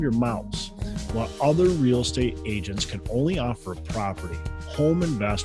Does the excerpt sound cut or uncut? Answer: uncut